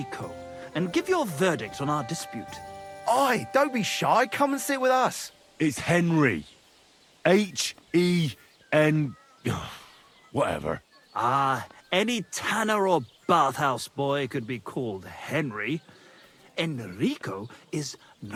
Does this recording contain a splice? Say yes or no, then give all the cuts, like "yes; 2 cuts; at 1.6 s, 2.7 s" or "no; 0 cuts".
no; 0 cuts